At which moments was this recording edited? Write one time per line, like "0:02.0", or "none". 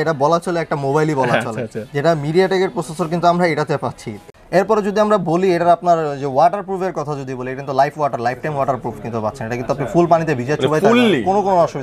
0:04.1